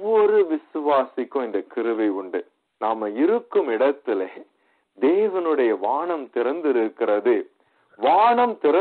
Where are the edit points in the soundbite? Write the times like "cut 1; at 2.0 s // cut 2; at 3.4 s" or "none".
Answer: cut 1; at 2.6 s